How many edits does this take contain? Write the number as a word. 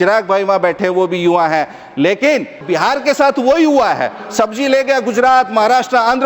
one